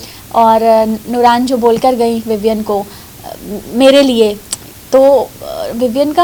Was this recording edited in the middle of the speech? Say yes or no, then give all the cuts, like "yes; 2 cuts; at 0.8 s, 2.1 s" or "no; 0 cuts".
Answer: no; 0 cuts